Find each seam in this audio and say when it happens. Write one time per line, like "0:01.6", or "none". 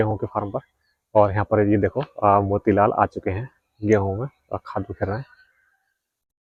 none